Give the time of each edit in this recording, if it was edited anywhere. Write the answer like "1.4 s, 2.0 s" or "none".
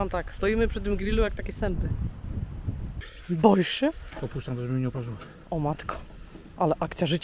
none